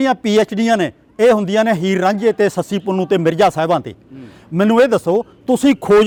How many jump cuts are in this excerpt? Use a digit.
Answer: 0